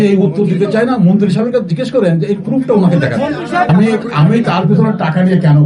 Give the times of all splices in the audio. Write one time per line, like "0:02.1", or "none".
0:03.7